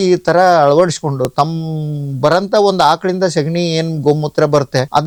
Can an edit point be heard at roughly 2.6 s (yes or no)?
no